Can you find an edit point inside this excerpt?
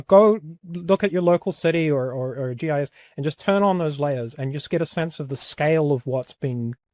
no; 0 cuts

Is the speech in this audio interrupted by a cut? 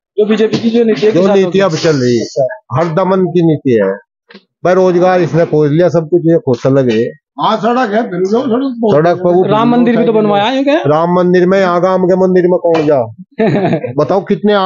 no; 0 cuts

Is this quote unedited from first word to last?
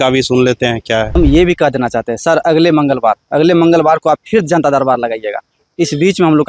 no; 1 cut; at 1.2 s

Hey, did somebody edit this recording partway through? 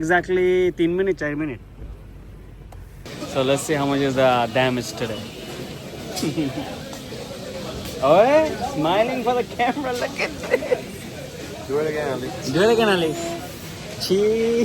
yes; 1 cut; at 3.0 s

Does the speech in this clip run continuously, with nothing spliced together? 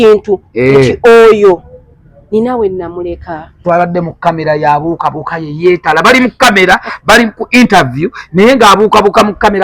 no; 1 cut; at 3.6 s

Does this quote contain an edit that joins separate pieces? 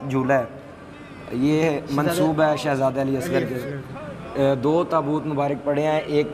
yes; 1 cut; at 4.2 s

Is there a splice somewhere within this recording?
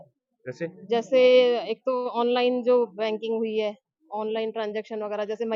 no; 0 cuts

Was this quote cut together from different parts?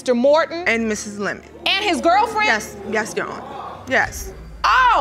no; 0 cuts

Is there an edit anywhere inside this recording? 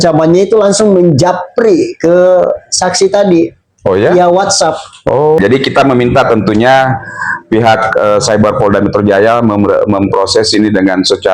yes; 1 cut; at 5.4 s

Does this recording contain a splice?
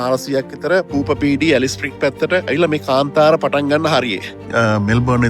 yes; 3 cuts; at 0.9 s, 2.5 s, 4.4 s

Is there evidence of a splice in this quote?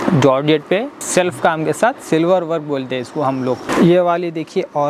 yes; 2 cuts; at 1.0 s, 3.6 s

